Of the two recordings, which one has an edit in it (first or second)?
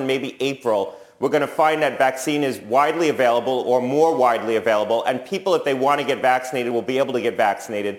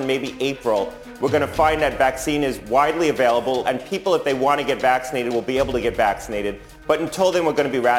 second